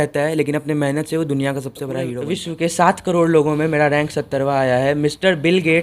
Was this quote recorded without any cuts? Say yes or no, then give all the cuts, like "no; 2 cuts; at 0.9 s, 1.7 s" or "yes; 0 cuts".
no; 1 cut; at 2.1 s